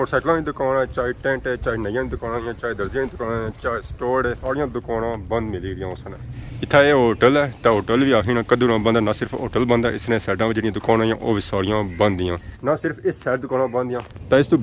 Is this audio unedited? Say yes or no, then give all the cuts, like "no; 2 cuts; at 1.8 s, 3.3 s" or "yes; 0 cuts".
yes; 0 cuts